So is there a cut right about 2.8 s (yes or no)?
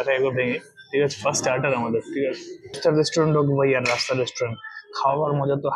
yes